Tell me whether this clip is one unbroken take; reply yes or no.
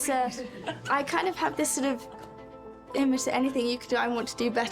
yes